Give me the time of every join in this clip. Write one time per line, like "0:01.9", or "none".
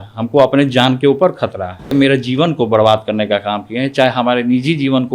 0:01.9

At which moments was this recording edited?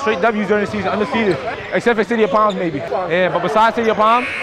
0:01.5
0:02.8

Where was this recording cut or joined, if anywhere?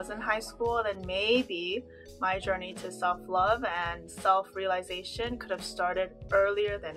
none

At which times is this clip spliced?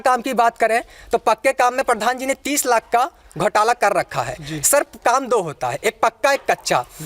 none

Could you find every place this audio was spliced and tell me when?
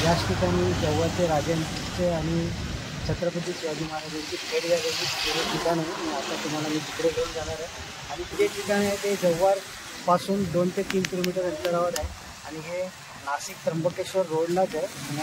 none

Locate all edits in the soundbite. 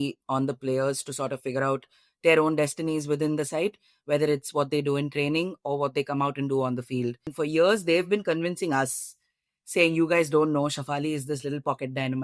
0:07.2

